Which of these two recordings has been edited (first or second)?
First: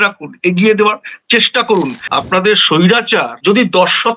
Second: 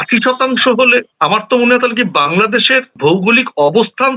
first